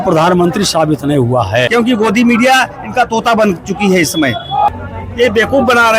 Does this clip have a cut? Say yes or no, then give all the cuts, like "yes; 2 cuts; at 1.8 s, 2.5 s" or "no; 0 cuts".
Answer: yes; 2 cuts; at 1.7 s, 4.7 s